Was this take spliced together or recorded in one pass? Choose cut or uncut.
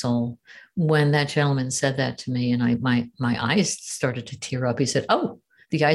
uncut